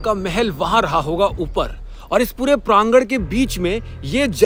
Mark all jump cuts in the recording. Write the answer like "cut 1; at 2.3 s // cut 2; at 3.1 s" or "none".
none